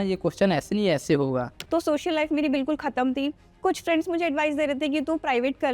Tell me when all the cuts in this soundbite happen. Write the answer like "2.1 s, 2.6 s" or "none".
1.6 s